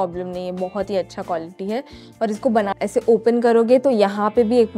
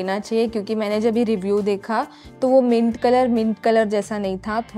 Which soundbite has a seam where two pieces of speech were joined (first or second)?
first